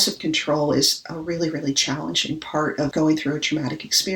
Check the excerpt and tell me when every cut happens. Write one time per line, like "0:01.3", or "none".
0:02.9